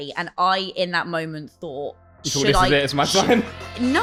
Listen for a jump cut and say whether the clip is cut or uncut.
uncut